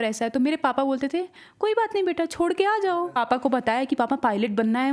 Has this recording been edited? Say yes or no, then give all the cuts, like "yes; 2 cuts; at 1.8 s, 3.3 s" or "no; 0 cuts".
yes; 1 cut; at 3.2 s